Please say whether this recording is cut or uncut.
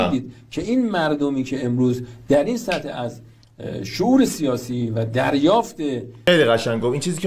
cut